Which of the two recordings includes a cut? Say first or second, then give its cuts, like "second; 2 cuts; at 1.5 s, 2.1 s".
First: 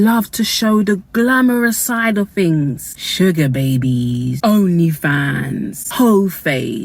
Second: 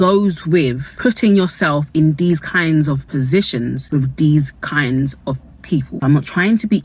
second; 2 cuts; at 3.0 s, 5.9 s